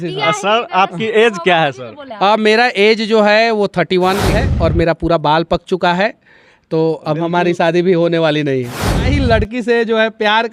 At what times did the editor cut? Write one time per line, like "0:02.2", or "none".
0:04.4
0:09.1